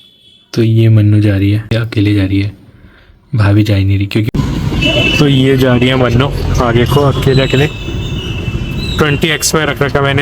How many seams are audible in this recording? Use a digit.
2